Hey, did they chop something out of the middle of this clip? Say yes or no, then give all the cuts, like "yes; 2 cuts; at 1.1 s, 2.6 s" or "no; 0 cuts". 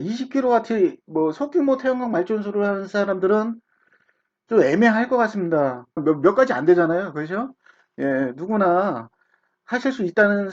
yes; 1 cut; at 6.0 s